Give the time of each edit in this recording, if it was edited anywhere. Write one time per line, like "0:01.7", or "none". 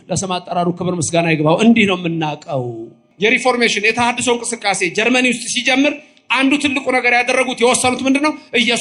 0:03.0

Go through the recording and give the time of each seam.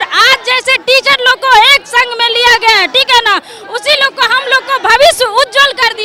none

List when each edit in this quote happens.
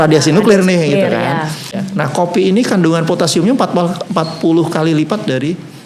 0:01.8

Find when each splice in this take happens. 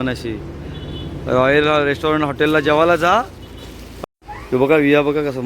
0:03.9

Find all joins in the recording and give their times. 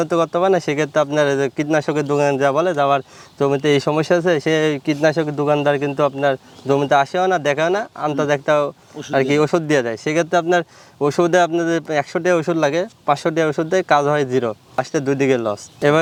none

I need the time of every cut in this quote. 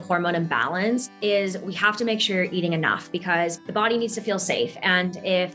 0:01.1
0:03.6

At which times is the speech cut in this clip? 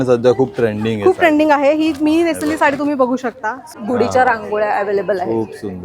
0:03.7

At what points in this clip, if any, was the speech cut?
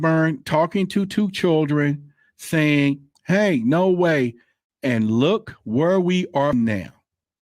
0:06.5

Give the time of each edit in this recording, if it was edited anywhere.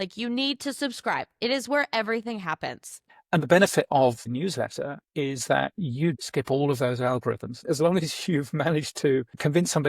0:03.0
0:04.3
0:06.2
0:07.6

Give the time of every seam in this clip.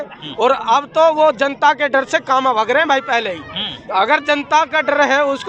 none

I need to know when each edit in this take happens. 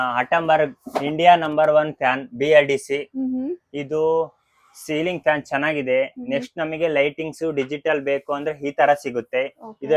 none

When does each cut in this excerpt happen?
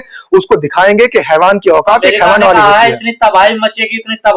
none

